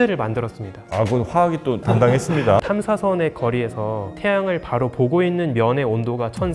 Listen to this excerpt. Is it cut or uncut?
cut